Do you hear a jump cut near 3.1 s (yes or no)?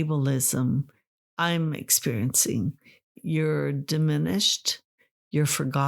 yes